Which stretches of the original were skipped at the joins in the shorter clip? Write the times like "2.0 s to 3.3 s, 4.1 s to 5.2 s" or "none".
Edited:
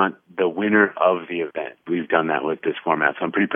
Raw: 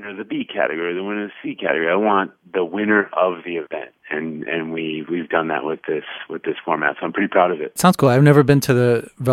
4.0 s to 5.0 s, 5.8 s to 6.4 s